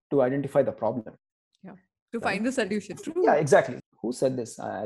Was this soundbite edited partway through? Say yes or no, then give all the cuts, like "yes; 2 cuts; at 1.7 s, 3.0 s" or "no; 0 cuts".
yes; 1 cut; at 3.8 s